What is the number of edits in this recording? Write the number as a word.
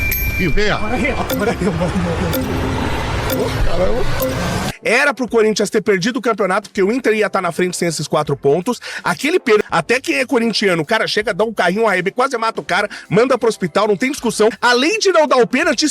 three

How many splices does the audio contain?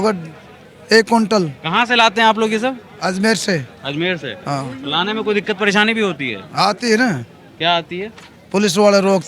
zero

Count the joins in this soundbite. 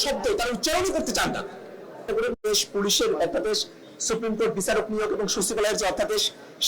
one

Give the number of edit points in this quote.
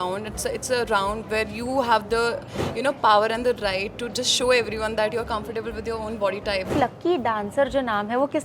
two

